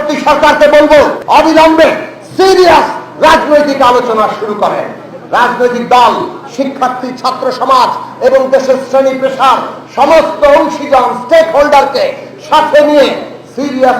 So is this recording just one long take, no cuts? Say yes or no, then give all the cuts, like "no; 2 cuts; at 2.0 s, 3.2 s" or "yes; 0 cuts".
no; 1 cut; at 1.2 s